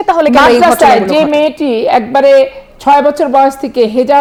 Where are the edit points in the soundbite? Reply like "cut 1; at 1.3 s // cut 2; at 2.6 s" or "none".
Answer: none